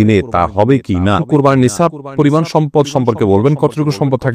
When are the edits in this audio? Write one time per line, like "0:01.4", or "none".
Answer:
0:01.2

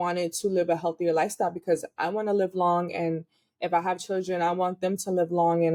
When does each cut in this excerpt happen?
none

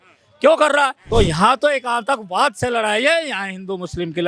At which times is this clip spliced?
0:01.0

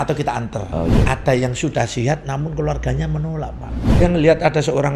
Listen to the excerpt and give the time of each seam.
0:01.0
0:04.0

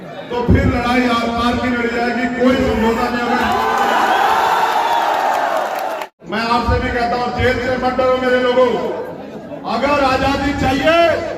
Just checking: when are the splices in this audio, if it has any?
0:06.1

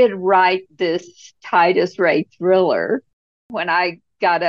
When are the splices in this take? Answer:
0:03.3

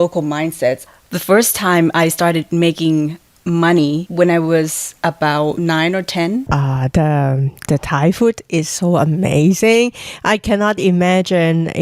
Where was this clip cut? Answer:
0:00.9
0:04.1
0:05.6
0:06.4

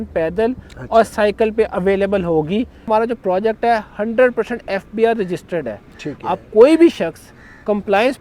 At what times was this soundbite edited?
0:02.8

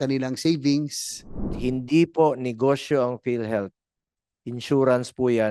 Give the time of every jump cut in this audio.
0:01.5

